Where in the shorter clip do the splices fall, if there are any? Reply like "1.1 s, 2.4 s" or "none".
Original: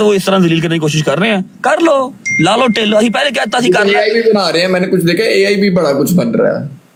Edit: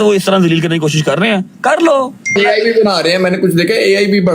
2.3 s